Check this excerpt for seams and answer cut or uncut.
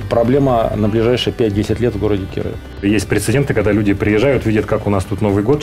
cut